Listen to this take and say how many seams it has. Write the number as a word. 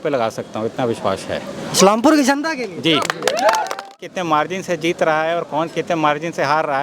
one